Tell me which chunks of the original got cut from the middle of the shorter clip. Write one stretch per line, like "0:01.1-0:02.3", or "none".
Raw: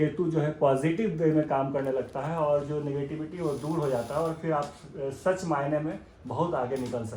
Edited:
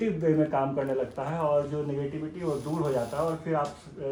none

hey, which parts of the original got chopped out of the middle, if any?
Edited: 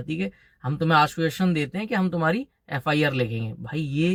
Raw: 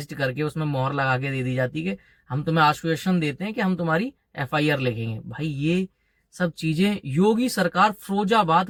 none

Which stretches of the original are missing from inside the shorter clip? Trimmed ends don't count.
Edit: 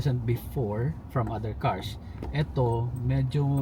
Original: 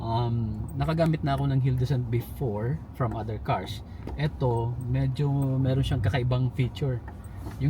none

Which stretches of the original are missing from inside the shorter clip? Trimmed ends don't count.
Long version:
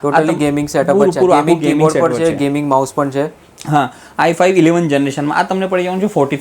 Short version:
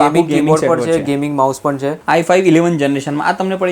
0:03.3-0:04.1

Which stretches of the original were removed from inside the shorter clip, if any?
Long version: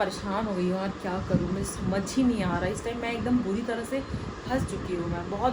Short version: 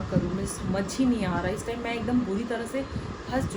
none

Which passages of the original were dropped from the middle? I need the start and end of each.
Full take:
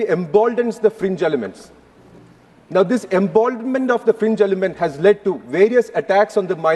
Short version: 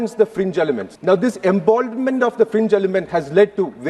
0:01.5-0:02.6

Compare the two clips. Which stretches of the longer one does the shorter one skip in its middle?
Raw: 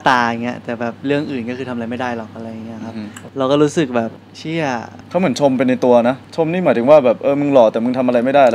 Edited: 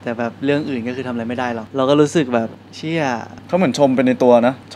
0:02.3-0:03.3

